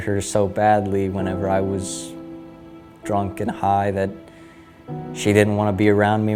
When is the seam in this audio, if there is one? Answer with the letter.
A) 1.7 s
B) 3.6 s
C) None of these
C